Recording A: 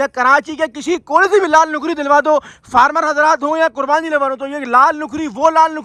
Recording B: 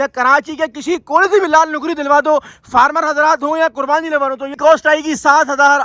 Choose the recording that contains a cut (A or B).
B